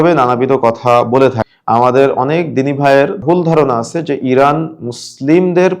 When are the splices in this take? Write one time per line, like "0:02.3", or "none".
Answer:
0:01.5
0:03.2